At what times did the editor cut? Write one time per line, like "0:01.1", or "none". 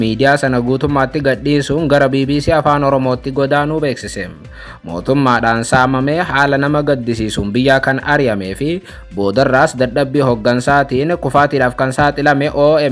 none